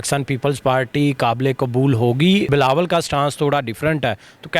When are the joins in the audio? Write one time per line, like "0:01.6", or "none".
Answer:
0:02.5